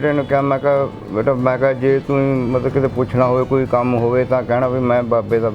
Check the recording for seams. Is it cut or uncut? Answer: uncut